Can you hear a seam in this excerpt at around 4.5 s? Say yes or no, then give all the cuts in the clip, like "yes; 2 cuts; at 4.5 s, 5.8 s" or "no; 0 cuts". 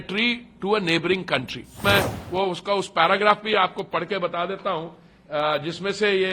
no; 1 cut; at 1.8 s